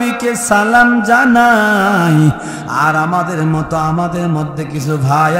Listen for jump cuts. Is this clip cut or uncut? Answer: uncut